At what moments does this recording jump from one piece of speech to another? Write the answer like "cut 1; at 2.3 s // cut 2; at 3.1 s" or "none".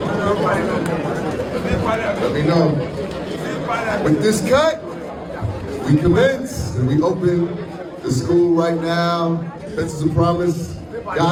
none